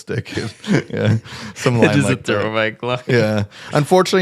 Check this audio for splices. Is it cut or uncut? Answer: uncut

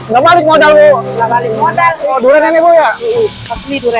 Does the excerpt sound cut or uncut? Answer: cut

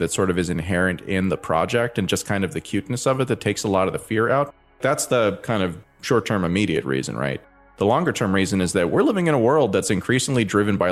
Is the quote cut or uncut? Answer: uncut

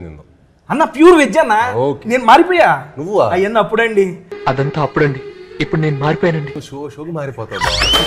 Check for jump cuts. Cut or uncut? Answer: uncut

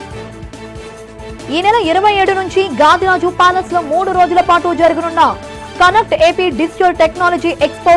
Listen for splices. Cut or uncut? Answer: cut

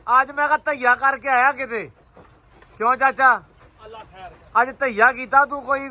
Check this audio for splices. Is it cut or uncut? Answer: uncut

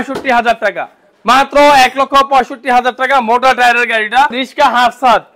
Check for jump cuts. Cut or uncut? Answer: cut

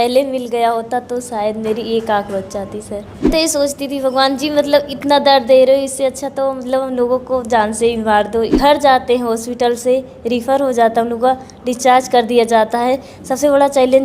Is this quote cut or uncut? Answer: cut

